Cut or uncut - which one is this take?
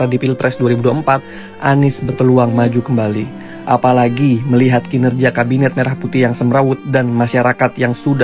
uncut